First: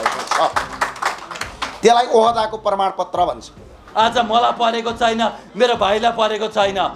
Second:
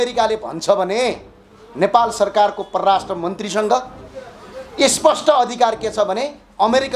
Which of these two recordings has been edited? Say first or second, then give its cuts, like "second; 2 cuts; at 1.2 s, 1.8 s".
first; 1 cut; at 3.8 s